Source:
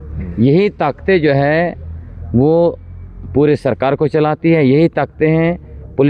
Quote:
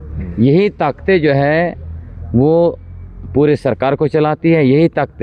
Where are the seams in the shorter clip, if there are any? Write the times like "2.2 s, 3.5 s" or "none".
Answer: none